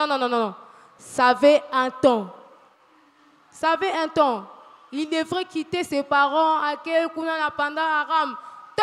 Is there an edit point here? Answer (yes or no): no